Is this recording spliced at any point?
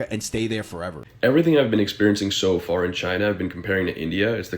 yes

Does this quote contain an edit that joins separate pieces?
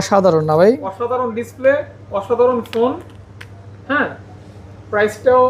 no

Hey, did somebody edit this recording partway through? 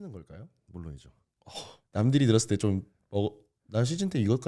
yes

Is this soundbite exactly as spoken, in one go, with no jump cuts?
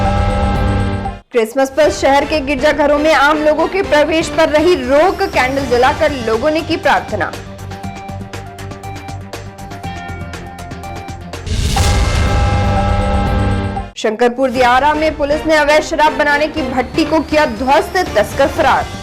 no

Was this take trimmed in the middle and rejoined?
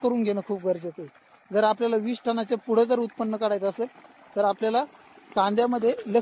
no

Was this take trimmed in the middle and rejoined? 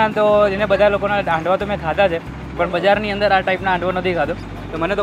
yes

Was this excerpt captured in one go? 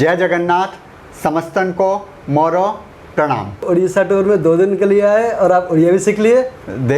no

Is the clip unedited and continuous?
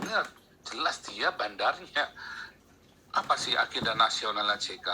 no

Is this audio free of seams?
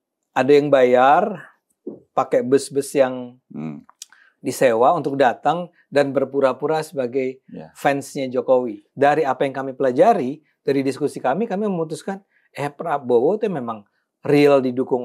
no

